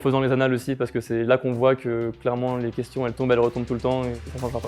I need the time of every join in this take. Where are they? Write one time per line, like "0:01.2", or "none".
none